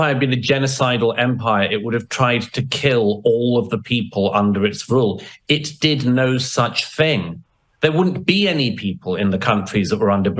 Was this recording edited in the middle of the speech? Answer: no; 0 cuts

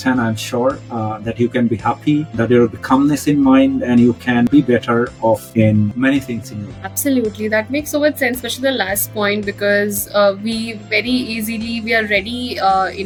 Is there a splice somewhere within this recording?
no; 0 cuts

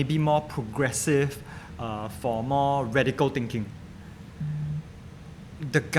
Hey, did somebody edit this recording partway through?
no; 0 cuts

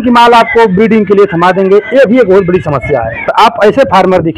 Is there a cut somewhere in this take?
yes; 1 cut; at 3.3 s

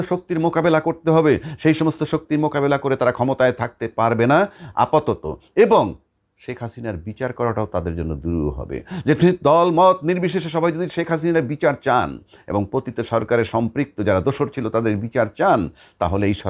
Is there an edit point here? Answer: no; 0 cuts

